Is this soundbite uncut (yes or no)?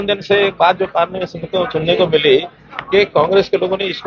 yes